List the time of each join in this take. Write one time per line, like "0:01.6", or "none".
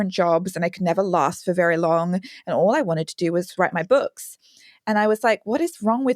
0:03.5